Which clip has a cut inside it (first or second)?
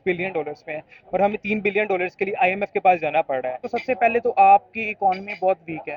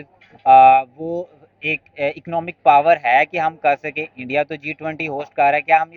first